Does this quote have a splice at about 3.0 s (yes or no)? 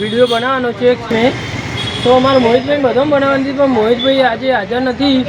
no